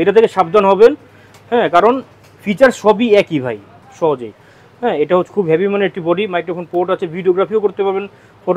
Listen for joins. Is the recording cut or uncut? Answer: cut